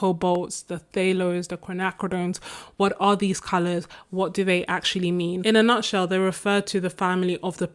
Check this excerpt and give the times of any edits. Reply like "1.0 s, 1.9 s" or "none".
none